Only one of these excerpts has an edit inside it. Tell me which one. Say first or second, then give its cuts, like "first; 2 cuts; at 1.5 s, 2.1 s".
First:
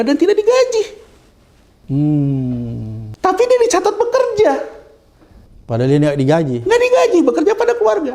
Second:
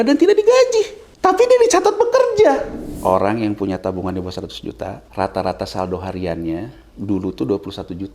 second; 3 cuts; at 1.0 s, 2.9 s, 5.0 s